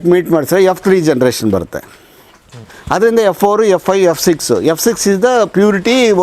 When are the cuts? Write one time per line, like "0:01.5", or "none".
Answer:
none